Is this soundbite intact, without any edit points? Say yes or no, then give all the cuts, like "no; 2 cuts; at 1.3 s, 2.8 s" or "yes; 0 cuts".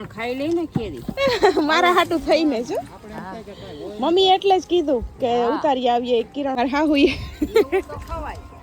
no; 1 cut; at 6.5 s